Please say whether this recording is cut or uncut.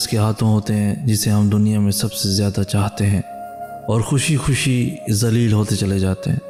uncut